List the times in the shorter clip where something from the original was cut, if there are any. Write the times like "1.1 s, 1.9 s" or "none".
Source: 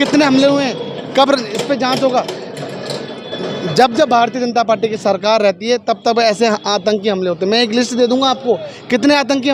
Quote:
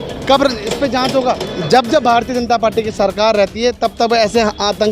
1.5 s